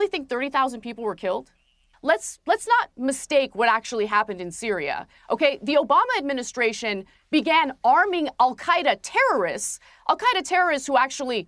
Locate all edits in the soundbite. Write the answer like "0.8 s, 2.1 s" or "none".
2.0 s